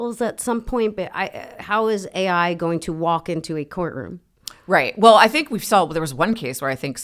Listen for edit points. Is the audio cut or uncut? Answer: uncut